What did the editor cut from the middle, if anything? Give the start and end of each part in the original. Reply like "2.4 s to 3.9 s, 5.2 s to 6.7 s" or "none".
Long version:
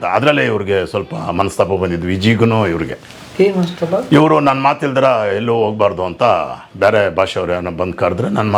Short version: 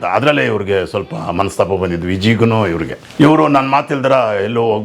3.1 s to 4.0 s